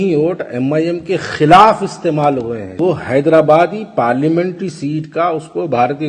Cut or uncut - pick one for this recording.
cut